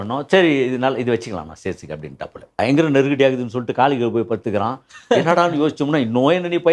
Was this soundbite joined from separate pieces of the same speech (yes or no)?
yes